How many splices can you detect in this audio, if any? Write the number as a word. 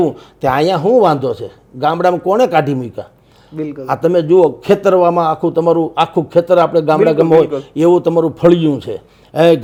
zero